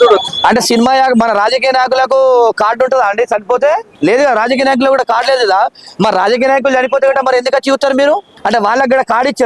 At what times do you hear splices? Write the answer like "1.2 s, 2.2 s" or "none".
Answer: 3.9 s, 8.3 s